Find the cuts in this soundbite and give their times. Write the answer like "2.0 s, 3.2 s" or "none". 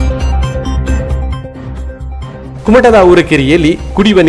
2.5 s